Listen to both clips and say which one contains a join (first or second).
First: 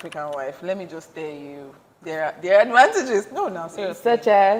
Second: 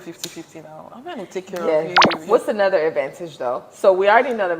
second